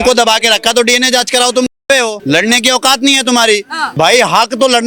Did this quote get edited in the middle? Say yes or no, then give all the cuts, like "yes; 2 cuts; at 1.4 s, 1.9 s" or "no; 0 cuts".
yes; 2 cuts; at 2.2 s, 3.8 s